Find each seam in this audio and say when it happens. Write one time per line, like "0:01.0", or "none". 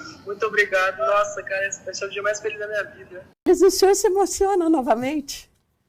0:03.4